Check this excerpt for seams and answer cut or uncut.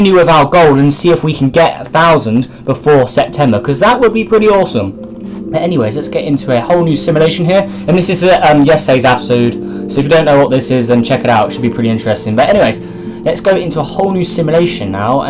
uncut